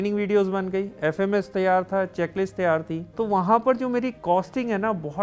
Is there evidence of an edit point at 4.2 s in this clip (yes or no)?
yes